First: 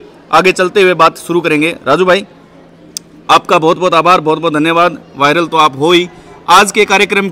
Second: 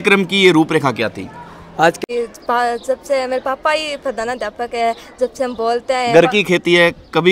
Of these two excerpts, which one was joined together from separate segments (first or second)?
second